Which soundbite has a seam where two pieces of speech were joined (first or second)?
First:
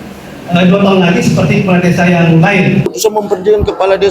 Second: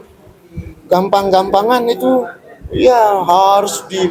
first